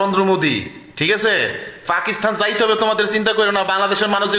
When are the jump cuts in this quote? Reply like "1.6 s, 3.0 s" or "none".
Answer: none